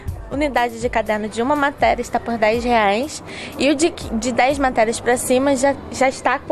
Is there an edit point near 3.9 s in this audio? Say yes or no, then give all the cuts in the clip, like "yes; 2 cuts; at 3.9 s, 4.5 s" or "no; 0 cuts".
no; 0 cuts